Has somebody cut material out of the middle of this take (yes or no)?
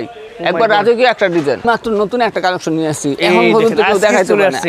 yes